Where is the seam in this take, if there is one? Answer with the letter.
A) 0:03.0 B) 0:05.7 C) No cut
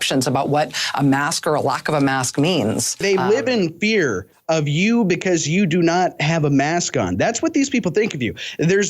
A